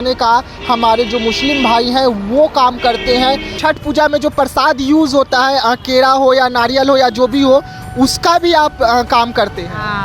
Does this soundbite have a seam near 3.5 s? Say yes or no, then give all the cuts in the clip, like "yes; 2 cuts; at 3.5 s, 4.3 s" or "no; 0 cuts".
yes; 1 cut; at 3.5 s